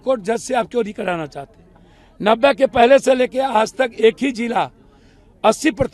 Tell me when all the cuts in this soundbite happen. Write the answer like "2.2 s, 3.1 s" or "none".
none